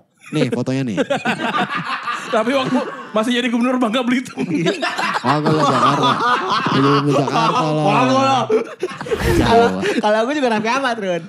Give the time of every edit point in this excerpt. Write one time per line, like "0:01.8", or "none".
0:09.4